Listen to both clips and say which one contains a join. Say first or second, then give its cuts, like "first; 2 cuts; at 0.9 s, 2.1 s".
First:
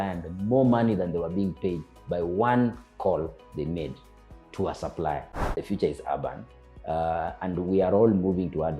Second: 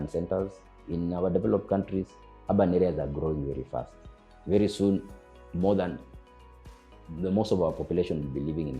first; 1 cut; at 5.5 s